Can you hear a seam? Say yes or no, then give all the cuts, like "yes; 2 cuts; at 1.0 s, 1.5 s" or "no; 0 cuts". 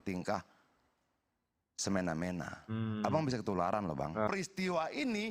yes; 1 cut; at 4.3 s